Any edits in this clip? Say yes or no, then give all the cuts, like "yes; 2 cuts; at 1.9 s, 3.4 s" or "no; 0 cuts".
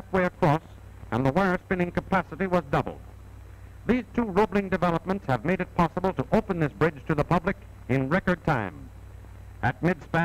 no; 0 cuts